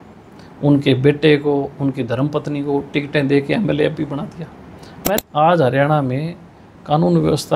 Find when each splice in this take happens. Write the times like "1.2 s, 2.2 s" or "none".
5.0 s